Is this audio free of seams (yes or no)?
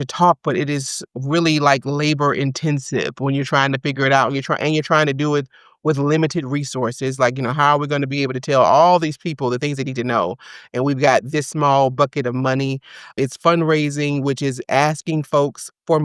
yes